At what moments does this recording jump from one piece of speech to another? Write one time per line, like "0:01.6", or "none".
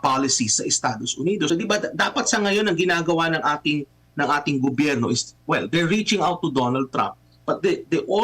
0:01.5

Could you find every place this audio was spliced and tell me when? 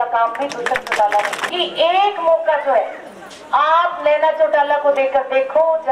0:01.4

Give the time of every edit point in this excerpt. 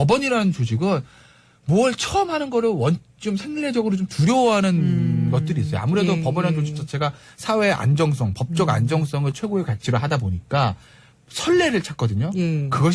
none

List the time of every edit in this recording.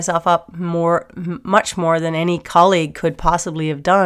none

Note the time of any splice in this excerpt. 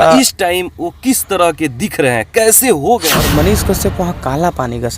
0:03.2

